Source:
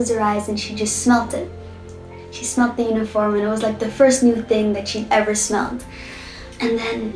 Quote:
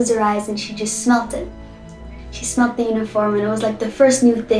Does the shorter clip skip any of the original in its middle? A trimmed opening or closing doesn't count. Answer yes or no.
no